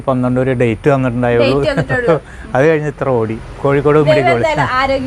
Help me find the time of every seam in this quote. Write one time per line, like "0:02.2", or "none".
none